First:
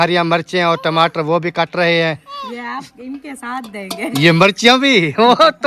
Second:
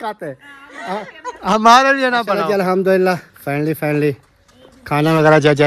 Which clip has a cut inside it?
second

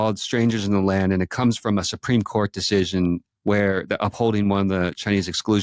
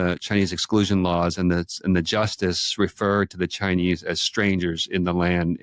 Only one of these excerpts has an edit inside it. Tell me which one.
first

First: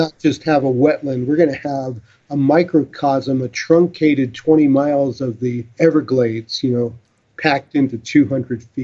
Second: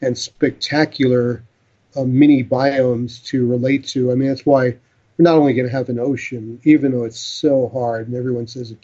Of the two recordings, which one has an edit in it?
first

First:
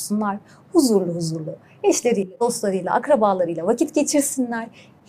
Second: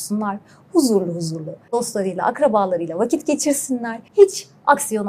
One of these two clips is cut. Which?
second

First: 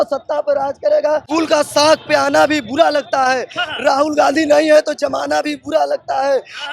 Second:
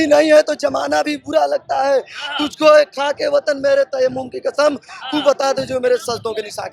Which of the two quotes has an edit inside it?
first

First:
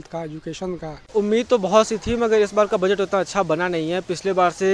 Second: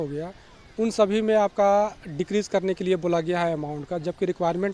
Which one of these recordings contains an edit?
first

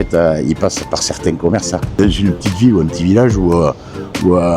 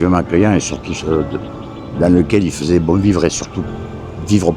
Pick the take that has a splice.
first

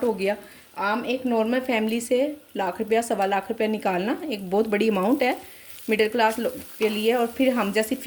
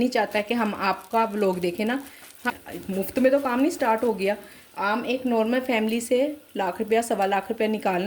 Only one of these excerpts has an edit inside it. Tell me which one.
second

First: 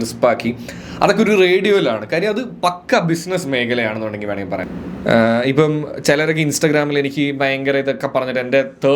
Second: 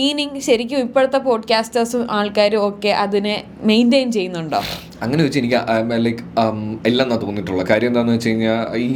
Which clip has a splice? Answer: first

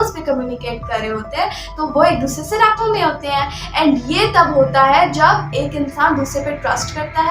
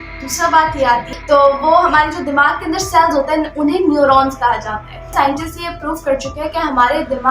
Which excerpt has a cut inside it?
second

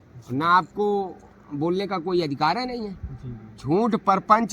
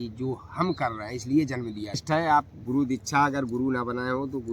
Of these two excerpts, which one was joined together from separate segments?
second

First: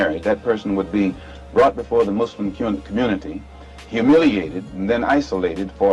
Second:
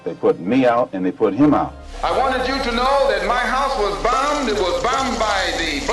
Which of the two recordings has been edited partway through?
second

